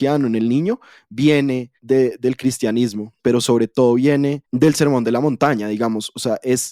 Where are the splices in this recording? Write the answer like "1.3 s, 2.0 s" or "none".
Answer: 1.7 s, 3.2 s, 4.4 s

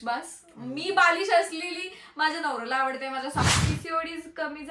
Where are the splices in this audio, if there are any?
3.4 s

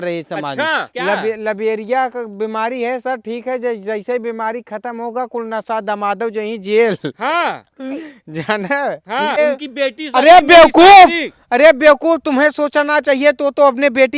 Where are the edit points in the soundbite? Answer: 0.9 s, 9.4 s

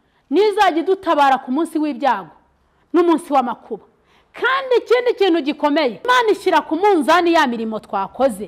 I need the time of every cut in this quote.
6.1 s

